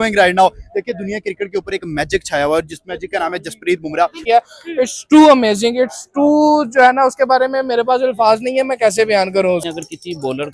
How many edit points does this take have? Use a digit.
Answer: 2